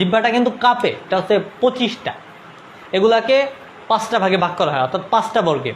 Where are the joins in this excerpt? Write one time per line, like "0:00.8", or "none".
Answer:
0:01.1